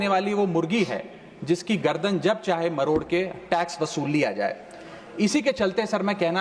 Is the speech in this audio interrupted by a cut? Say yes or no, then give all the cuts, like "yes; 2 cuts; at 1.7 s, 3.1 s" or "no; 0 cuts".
no; 0 cuts